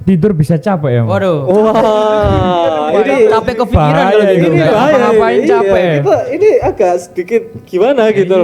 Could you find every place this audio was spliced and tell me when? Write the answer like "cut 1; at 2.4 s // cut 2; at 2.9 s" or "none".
none